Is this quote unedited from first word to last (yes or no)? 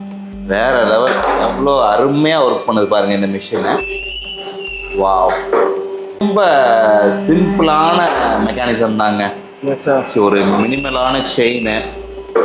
no